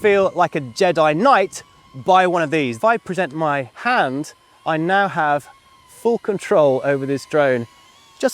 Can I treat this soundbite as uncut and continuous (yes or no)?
no